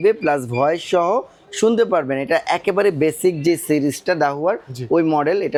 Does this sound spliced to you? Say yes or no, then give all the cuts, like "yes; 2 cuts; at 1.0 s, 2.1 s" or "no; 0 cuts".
no; 0 cuts